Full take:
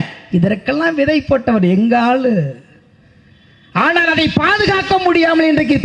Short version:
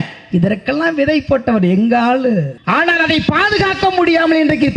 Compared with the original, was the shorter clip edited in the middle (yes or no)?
yes